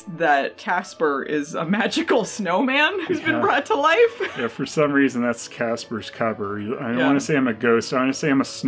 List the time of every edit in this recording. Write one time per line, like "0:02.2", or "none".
none